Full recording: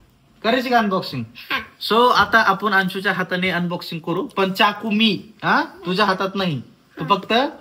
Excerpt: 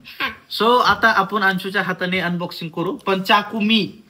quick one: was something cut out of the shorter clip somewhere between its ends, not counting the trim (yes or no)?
no